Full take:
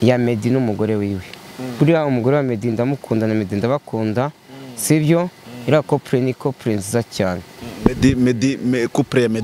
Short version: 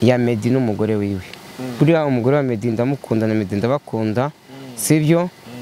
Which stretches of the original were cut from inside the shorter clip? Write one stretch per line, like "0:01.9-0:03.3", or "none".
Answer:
none